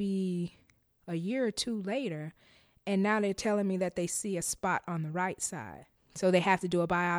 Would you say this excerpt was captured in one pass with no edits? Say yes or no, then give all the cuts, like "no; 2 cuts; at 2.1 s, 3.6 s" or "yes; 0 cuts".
yes; 0 cuts